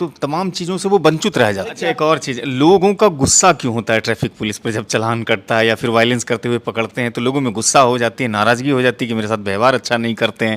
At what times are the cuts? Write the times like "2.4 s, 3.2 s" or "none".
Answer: 1.7 s